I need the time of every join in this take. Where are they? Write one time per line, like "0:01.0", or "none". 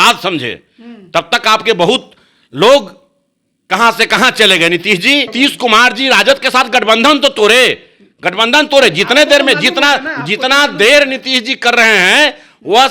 0:05.3